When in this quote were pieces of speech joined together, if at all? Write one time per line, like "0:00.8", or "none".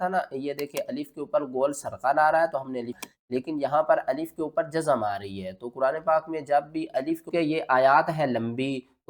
0:03.0
0:07.3